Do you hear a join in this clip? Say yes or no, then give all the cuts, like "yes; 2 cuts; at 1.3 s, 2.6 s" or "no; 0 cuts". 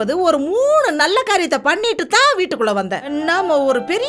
yes; 1 cut; at 3.1 s